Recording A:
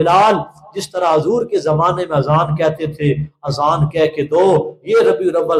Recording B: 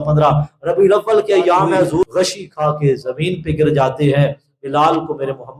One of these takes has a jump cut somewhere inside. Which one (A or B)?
B